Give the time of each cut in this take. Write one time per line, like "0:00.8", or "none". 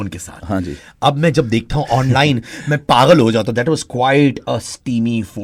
none